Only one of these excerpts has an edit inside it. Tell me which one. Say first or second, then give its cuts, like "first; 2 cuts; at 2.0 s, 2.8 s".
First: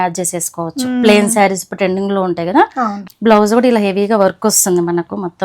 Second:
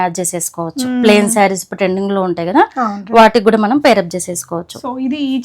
first; 1 cut; at 3.0 s